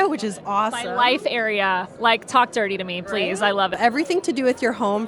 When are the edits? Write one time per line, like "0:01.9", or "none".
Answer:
0:03.8